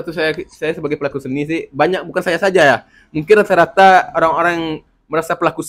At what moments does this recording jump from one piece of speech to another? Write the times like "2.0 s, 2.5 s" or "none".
none